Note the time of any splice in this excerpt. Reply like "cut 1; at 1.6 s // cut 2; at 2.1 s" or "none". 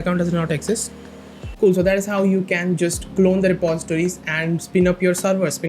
cut 1; at 1.4 s